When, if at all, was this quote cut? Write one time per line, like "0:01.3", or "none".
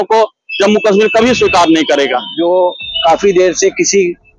0:02.3